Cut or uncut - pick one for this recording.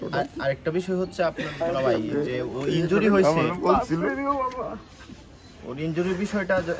uncut